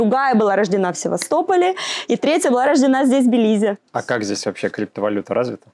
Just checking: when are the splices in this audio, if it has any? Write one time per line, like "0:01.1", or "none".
0:03.9